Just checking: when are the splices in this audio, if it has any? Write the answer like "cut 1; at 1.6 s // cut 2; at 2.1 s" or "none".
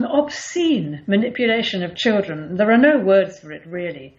none